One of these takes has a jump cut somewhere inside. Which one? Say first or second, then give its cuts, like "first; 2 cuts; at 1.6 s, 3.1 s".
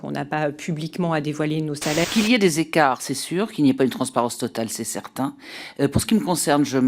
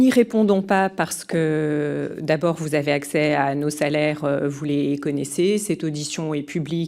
first; 1 cut; at 2.1 s